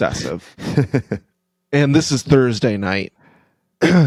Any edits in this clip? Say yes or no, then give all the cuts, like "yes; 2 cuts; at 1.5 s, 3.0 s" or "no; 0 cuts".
no; 0 cuts